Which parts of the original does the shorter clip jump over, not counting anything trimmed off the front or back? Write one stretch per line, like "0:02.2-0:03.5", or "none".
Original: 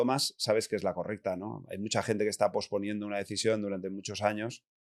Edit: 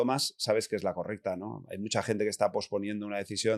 none